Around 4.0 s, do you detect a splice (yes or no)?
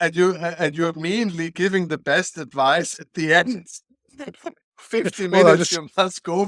no